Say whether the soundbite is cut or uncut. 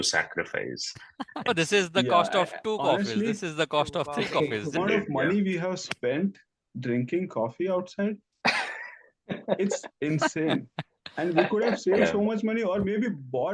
cut